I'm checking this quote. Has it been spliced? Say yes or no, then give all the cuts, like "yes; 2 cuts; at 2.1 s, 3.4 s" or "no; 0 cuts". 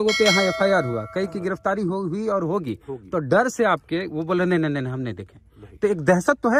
no; 0 cuts